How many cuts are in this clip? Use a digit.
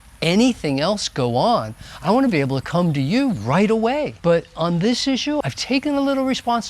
2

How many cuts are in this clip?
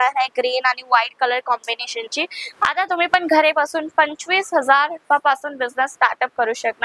1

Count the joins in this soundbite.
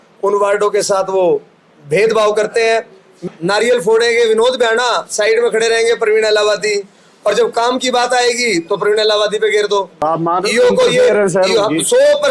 2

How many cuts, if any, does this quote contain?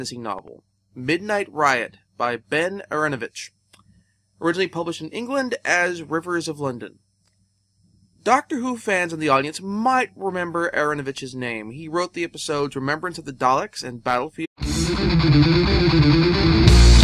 0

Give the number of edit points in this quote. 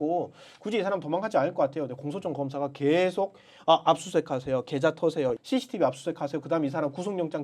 1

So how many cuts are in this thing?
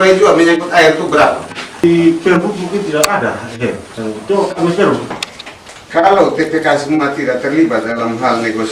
2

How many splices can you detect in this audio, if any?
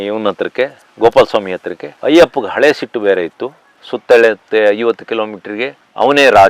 1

